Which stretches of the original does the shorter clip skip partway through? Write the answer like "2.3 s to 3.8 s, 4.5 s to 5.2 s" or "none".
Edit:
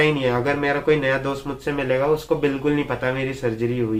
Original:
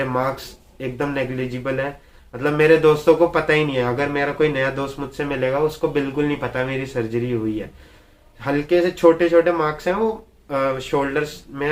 none